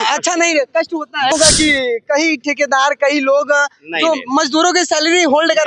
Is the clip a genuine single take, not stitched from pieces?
no; 1 cut; at 1.3 s

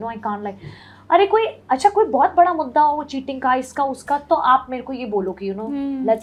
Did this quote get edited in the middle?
no; 0 cuts

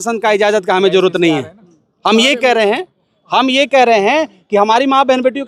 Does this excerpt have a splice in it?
no; 0 cuts

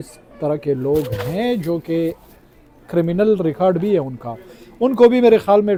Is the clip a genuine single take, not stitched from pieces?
yes; 0 cuts

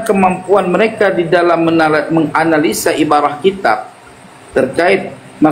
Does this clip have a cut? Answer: no; 0 cuts

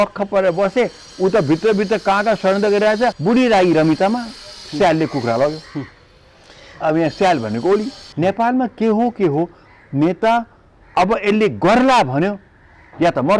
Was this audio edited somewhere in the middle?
yes; 2 cuts; at 3.2 s, 8.0 s

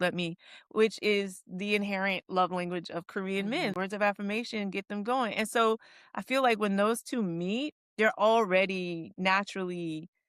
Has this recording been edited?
yes; 1 cut; at 3.7 s

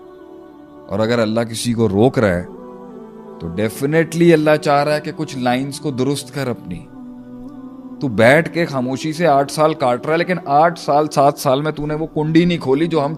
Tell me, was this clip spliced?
no; 0 cuts

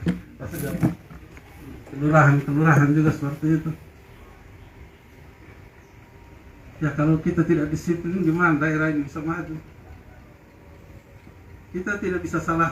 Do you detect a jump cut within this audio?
no; 0 cuts

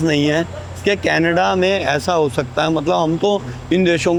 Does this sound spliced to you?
no; 0 cuts

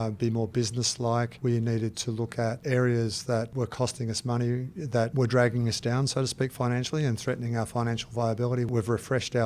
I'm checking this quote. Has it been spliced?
yes; 5 cuts; at 1.3 s, 2.6 s, 3.5 s, 5.1 s, 8.7 s

